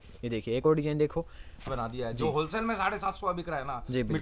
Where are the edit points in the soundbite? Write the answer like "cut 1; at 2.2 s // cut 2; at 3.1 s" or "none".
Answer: cut 1; at 1.7 s